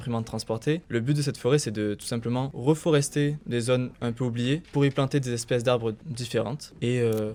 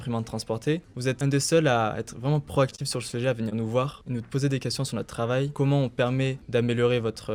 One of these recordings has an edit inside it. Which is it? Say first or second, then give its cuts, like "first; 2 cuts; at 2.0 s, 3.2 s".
second; 3 cuts; at 0.9 s, 4.0 s, 6.4 s